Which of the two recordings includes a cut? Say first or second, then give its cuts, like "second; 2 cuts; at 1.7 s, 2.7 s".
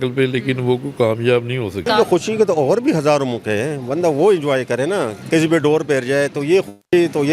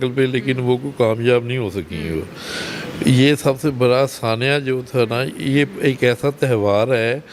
first; 2 cuts; at 1.9 s, 5.2 s